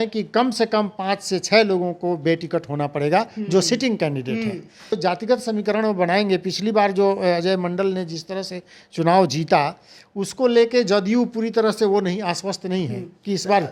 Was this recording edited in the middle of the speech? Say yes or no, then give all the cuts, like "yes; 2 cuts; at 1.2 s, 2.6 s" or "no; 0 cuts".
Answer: yes; 1 cut; at 5.0 s